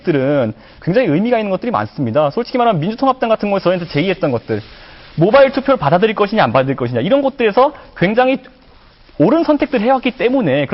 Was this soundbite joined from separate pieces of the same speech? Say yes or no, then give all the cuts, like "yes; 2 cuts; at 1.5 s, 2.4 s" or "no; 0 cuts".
no; 0 cuts